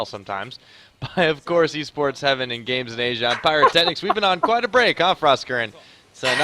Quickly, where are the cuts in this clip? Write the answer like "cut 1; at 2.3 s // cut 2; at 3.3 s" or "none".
cut 1; at 1.2 s